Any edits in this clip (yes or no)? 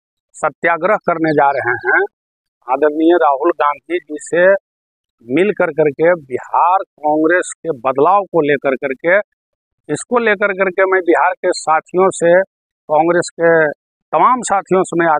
no